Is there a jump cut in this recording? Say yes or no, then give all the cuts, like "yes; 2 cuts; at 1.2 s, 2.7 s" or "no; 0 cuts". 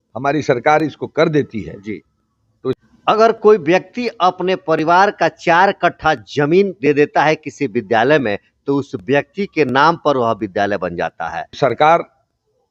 yes; 2 cuts; at 2.8 s, 11.6 s